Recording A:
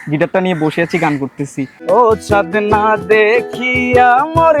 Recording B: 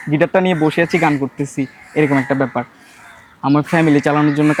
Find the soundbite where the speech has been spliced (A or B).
A